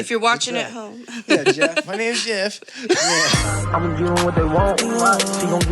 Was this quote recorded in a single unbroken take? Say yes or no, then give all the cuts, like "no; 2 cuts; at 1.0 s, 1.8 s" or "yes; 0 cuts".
no; 1 cut; at 3.4 s